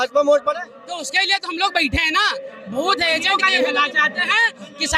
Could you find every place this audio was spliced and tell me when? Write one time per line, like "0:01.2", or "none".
0:03.2